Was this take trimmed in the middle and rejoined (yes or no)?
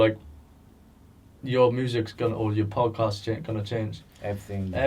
no